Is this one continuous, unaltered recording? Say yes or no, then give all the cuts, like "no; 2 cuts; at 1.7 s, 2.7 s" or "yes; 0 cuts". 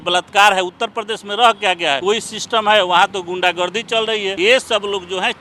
no; 2 cuts; at 2.0 s, 4.4 s